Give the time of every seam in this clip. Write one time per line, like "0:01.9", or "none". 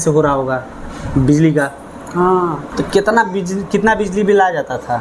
0:02.7